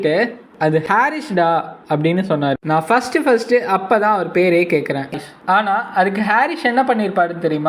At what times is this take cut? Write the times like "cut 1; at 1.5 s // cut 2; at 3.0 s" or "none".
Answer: cut 1; at 5.1 s